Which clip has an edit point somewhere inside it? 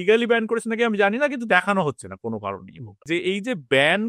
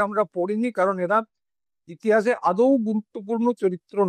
first; 1 cut; at 3.1 s

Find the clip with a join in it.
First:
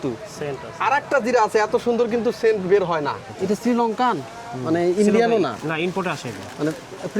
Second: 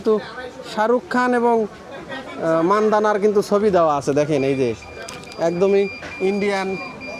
first; 1 cut; at 3.3 s

